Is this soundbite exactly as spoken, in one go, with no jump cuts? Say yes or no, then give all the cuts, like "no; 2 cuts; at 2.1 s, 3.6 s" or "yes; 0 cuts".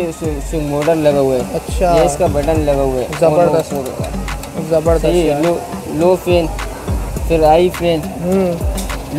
yes; 0 cuts